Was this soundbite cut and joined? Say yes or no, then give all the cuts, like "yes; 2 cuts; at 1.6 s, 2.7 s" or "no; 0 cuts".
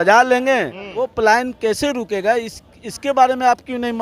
yes; 1 cut; at 1.1 s